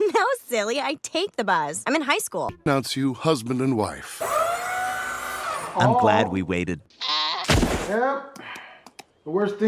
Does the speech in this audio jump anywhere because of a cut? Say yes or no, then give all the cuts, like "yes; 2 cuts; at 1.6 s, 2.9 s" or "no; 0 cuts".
yes; 2 cuts; at 2.6 s, 6.8 s